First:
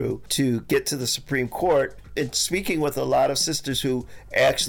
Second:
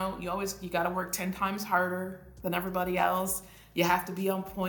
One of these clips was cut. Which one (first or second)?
first